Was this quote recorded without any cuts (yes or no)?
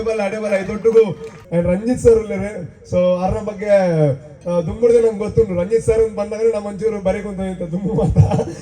no